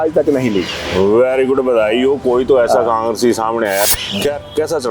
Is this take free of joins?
no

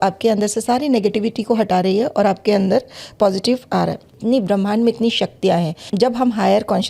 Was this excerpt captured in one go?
no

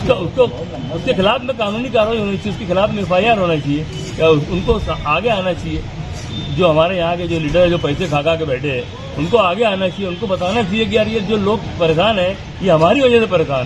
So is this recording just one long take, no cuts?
yes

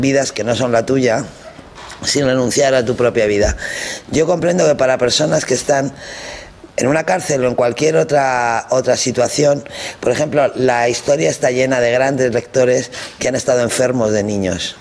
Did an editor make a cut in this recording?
no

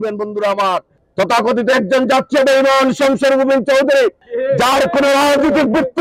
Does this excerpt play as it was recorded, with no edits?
no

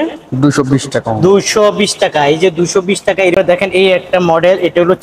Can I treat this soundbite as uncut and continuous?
no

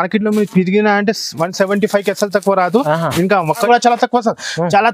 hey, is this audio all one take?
no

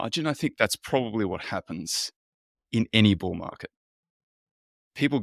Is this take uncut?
yes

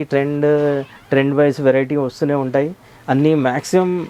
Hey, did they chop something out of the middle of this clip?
no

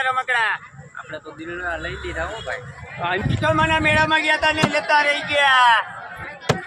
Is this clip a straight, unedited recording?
no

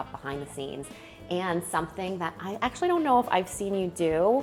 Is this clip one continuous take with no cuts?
yes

